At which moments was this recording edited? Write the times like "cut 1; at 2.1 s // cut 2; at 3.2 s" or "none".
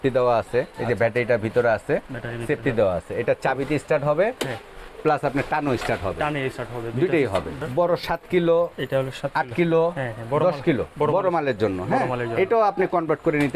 cut 1; at 7.5 s